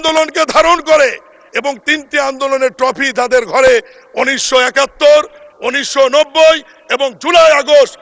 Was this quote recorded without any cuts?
yes; 0 cuts

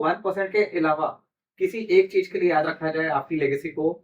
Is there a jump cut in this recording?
no; 0 cuts

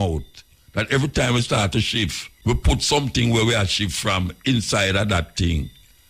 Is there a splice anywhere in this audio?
yes; 1 cut; at 2.3 s

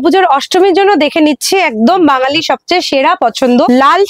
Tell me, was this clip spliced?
no; 0 cuts

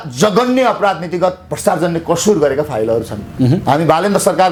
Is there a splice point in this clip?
no; 0 cuts

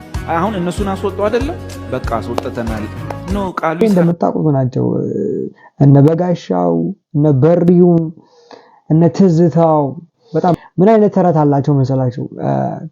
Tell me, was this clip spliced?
yes; 2 cuts; at 3.8 s, 10.6 s

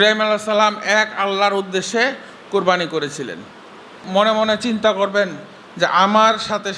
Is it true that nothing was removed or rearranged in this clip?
no; 1 cut; at 4.0 s

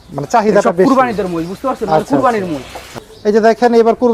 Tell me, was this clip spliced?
yes; 1 cut; at 3.1 s

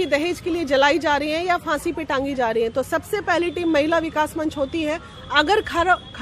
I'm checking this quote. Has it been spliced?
no; 0 cuts

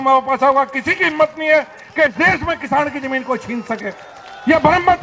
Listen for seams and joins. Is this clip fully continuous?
yes; 0 cuts

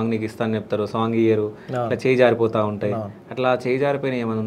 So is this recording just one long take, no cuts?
yes; 0 cuts

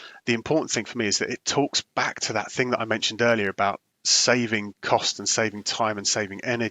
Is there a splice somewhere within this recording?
no; 0 cuts

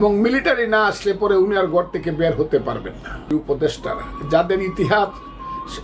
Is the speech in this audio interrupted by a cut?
yes; 1 cut; at 3.3 s

